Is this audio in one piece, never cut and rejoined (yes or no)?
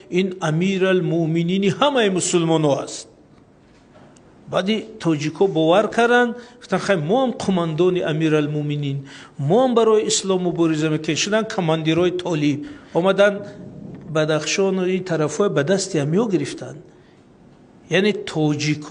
no